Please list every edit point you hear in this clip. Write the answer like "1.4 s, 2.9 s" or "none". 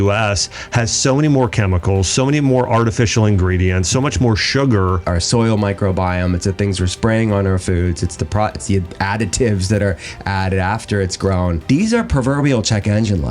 5.0 s, 11.6 s